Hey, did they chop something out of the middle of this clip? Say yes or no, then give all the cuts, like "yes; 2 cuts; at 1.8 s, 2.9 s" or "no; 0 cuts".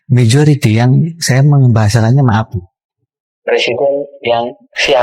no; 0 cuts